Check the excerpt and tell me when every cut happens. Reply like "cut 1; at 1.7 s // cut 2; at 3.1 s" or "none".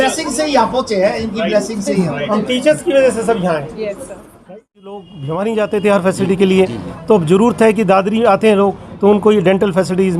cut 1; at 5.1 s